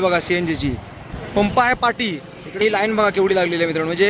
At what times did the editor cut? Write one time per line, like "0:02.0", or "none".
0:01.1
0:02.6